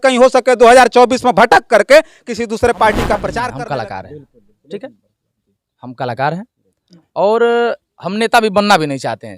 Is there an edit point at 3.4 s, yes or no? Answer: yes